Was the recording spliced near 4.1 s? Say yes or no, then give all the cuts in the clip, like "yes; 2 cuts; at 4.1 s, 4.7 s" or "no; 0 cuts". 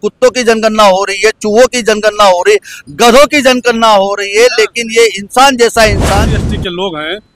no; 1 cut; at 6.3 s